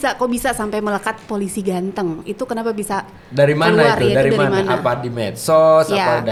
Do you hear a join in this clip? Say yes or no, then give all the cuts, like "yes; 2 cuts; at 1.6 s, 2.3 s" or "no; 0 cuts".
no; 0 cuts